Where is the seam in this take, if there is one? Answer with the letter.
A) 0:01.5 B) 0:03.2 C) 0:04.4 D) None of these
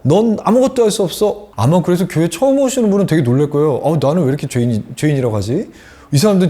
A